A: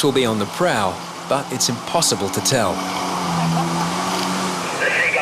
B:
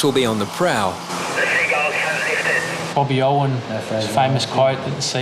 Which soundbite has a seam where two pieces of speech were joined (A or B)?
B